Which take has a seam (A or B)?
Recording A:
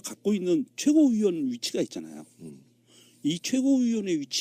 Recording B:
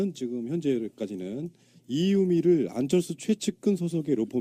A